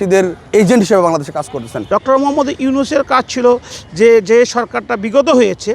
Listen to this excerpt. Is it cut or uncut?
cut